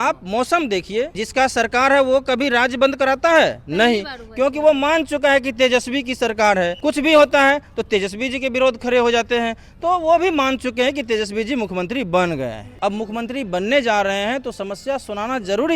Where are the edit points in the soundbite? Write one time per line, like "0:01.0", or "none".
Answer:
0:01.2
0:06.8
0:12.6